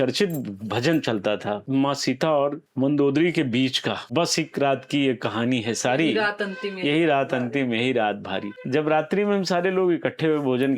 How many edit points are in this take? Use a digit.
4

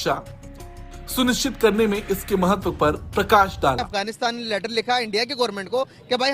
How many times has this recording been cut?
1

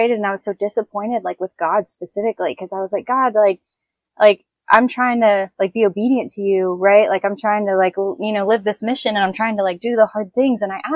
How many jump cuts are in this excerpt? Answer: 0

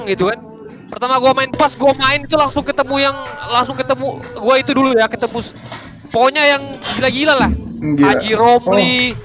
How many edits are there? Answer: 1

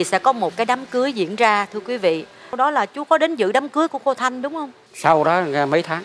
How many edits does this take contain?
1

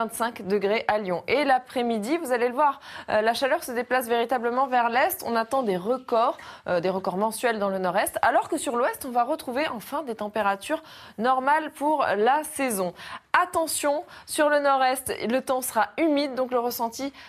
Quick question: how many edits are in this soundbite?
1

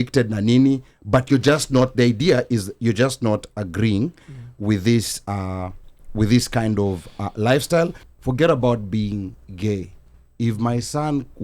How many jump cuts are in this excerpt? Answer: 1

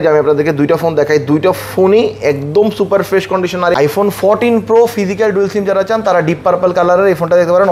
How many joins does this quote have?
1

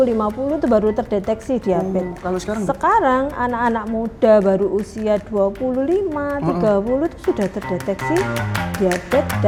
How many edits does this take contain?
0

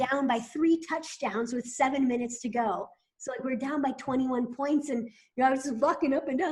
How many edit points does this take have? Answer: 0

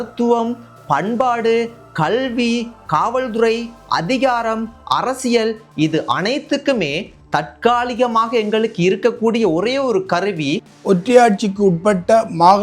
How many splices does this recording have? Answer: 1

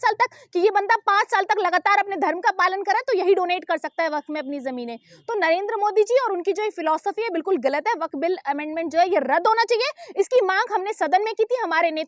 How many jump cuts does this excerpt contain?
0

